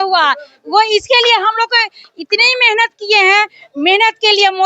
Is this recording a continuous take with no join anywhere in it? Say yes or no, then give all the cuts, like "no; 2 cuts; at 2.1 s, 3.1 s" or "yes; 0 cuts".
yes; 0 cuts